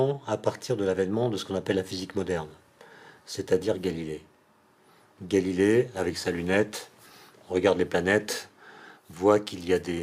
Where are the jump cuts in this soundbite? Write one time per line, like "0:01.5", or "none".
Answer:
none